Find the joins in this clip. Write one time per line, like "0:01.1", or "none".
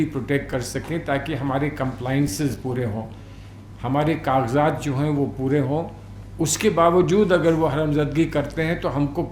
none

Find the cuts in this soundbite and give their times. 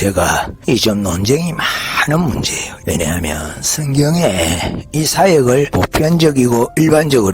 0:02.7
0:05.7

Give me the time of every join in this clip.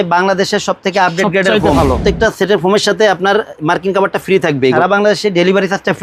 0:01.8
0:04.8

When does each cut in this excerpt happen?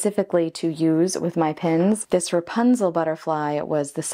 0:02.0

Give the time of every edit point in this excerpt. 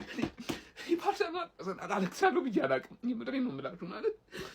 0:01.6

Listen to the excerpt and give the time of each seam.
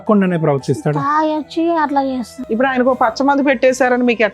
0:02.3

